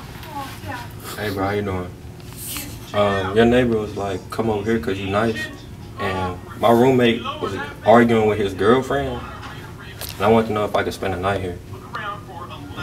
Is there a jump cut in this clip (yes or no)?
no